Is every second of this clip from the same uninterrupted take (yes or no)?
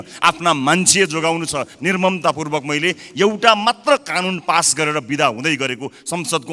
yes